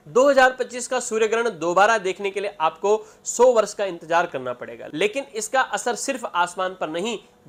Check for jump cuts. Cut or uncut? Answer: uncut